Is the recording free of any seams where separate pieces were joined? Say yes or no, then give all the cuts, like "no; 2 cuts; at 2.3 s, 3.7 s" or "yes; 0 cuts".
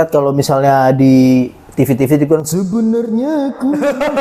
yes; 0 cuts